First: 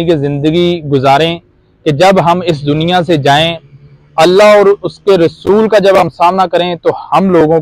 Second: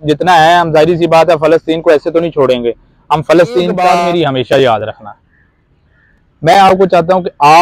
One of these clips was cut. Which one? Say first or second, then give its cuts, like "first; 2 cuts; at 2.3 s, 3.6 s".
second; 1 cut; at 3.8 s